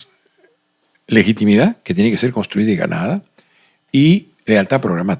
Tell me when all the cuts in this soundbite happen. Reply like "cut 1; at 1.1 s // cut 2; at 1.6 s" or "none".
none

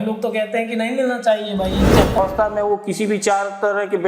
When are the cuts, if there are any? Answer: cut 1; at 2.2 s

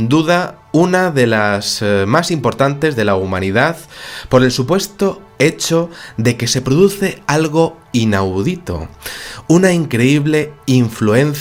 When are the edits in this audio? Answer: none

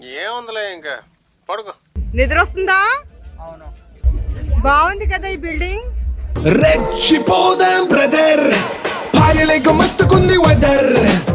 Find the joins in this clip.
none

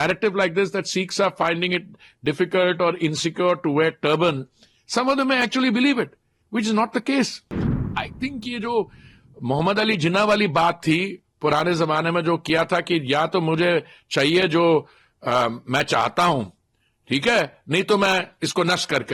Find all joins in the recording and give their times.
cut 1; at 7.8 s

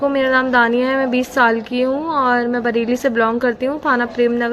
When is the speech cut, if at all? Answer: none

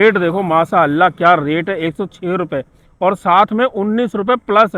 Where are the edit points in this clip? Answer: none

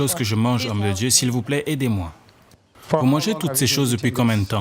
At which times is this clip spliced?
cut 1; at 3.0 s

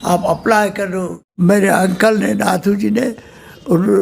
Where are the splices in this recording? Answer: cut 1; at 1.4 s

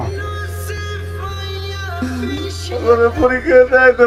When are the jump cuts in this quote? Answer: none

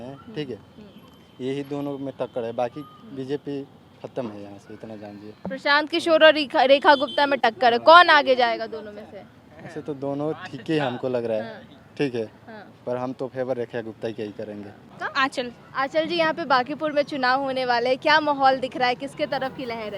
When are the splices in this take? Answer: none

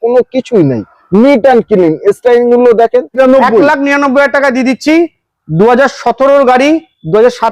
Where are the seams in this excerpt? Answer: cut 1; at 3.2 s

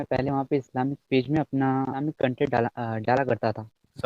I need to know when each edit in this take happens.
cut 1; at 2.0 s

